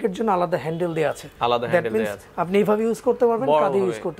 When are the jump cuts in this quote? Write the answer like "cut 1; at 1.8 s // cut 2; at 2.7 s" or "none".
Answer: cut 1; at 1.3 s